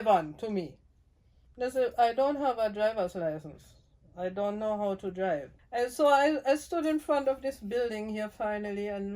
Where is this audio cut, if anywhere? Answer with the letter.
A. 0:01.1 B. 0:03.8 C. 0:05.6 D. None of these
C